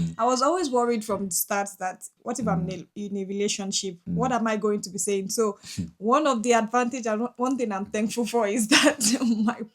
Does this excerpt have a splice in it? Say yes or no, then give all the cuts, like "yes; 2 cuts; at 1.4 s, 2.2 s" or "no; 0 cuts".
yes; 1 cut; at 2.1 s